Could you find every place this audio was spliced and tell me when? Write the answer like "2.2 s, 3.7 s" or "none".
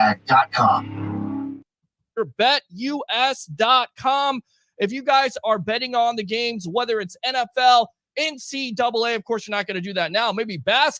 1.6 s